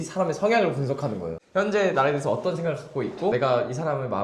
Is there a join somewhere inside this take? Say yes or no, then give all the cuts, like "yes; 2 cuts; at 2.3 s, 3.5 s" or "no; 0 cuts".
yes; 2 cuts; at 1.3 s, 3.3 s